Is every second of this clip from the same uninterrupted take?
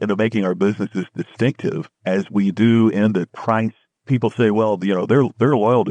no; 2 cuts; at 1.9 s, 3.6 s

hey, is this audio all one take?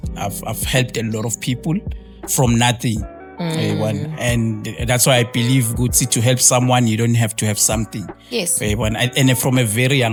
yes; 0 cuts

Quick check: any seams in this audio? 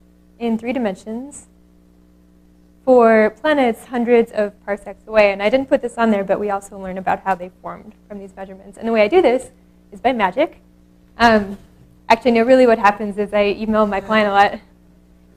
no; 0 cuts

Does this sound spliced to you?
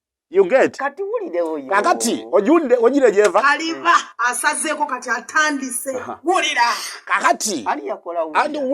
no; 0 cuts

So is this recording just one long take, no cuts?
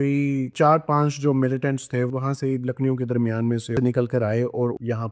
no; 2 cuts; at 2.1 s, 3.7 s

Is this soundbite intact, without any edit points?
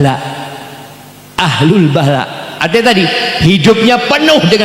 yes; 0 cuts

